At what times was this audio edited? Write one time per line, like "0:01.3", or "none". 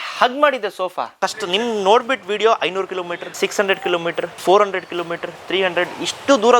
0:01.1
0:03.2
0:04.3